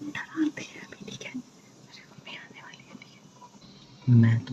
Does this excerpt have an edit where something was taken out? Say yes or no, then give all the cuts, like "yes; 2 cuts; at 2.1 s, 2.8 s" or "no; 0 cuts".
yes; 1 cut; at 3.6 s